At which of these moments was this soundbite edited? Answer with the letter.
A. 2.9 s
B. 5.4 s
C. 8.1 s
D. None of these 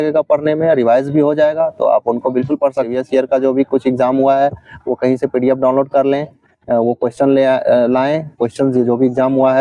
A